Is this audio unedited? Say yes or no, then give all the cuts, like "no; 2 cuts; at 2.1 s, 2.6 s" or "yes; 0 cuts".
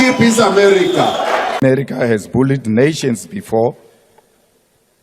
no; 1 cut; at 1.6 s